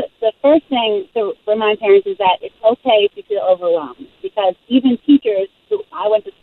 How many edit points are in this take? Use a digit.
1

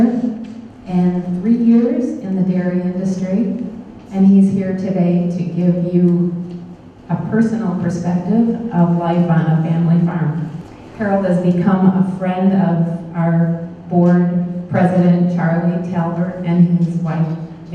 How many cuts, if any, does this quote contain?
1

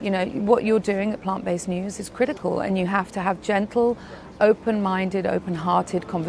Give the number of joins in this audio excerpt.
0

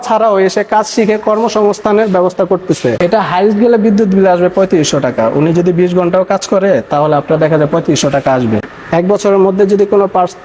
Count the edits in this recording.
2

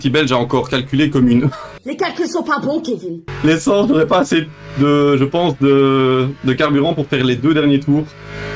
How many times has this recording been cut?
0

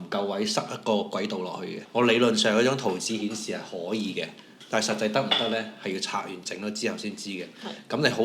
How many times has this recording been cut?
0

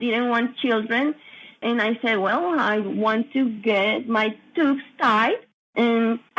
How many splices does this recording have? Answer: 0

